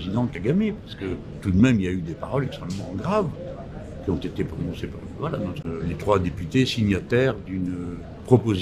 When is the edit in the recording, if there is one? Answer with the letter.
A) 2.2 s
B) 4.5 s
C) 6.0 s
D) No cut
C